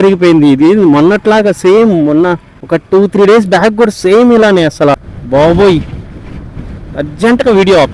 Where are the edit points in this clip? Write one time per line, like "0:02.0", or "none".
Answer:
0:02.5
0:04.9